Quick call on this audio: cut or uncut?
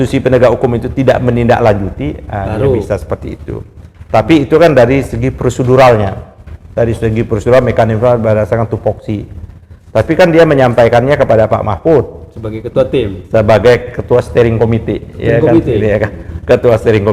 uncut